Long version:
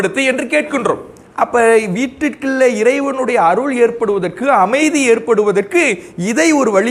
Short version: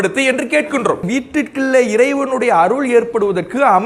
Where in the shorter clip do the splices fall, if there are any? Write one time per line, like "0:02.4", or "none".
0:01.0